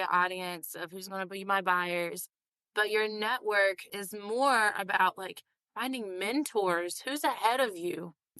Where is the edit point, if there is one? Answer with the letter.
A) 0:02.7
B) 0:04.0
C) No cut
B